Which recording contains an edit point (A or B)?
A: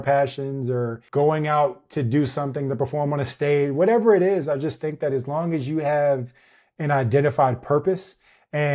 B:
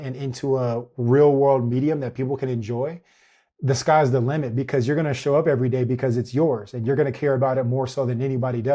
A